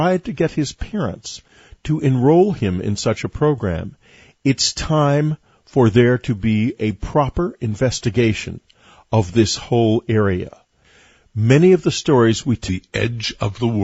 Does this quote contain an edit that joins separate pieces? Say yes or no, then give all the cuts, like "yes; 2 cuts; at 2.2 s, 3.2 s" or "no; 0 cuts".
no; 0 cuts